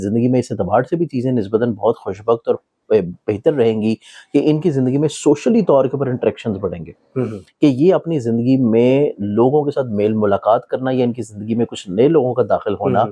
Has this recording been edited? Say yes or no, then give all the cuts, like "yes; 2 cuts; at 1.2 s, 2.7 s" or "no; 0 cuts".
no; 0 cuts